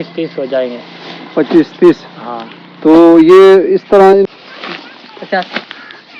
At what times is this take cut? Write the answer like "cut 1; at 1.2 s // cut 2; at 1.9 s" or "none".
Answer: cut 1; at 4.3 s